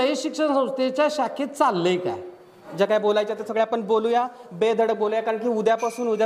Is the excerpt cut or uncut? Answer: cut